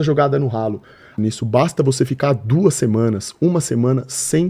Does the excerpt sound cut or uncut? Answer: cut